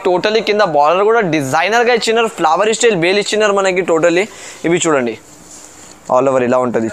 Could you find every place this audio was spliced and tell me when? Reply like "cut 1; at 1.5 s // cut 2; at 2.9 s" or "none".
none